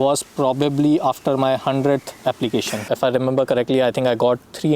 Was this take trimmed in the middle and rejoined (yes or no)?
yes